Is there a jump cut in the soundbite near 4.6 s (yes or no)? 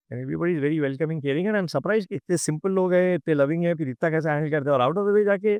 no